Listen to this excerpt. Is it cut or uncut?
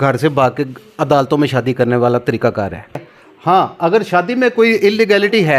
cut